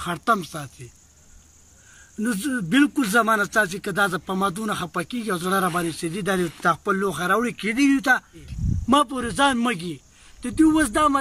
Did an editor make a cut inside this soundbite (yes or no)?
yes